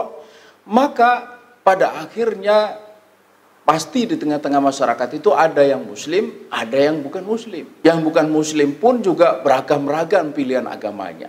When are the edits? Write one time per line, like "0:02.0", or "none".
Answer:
0:07.6